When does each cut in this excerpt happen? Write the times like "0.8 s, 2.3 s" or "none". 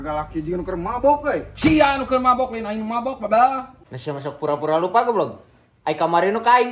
3.7 s